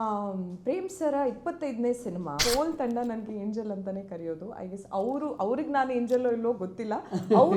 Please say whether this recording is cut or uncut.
cut